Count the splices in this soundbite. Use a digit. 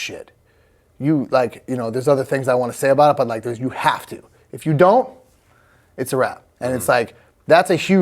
1